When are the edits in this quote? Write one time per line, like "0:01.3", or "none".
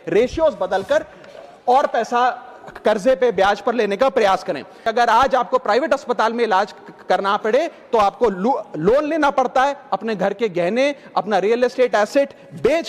0:04.9